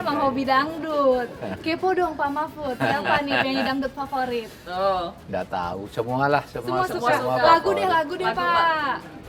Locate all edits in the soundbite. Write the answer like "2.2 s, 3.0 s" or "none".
none

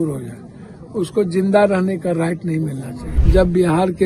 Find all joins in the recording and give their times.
3.2 s

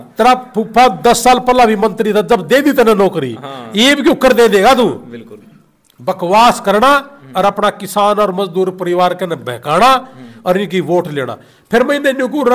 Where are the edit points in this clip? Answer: none

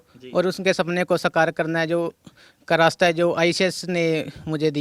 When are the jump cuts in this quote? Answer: none

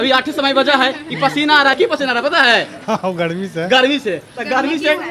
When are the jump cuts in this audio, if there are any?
none

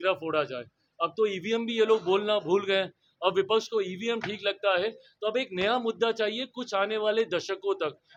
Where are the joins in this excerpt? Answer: none

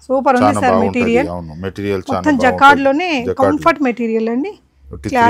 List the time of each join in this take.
none

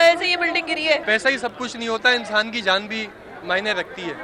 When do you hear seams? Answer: 1.0 s

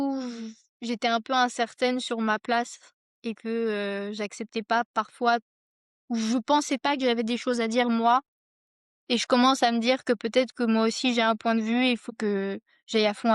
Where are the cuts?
12.1 s

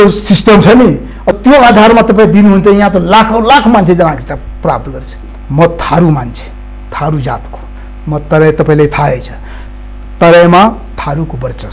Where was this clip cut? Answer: 1.3 s, 5.2 s

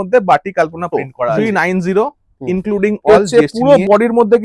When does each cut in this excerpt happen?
1.4 s, 3.1 s

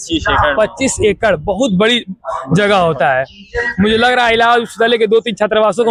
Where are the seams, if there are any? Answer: none

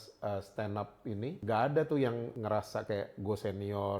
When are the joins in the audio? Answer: 1.4 s, 2.3 s

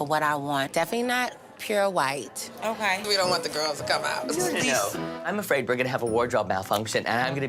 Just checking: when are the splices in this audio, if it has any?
none

